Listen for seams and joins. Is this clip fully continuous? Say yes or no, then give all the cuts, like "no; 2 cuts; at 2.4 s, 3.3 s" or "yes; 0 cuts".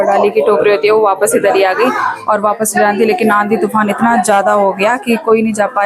yes; 0 cuts